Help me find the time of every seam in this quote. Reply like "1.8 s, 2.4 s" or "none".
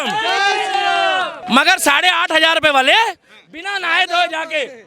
1.4 s